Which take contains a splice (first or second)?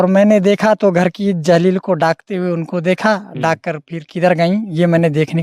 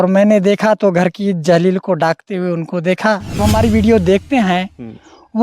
second